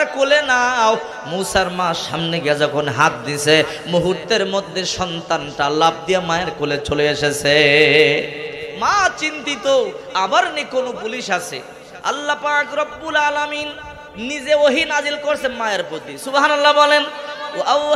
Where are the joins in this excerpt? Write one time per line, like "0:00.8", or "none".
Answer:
none